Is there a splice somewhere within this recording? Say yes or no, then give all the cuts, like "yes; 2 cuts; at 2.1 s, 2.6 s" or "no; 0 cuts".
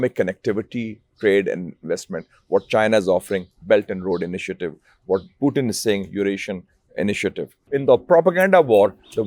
yes; 1 cut; at 7.7 s